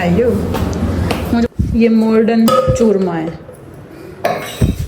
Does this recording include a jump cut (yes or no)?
yes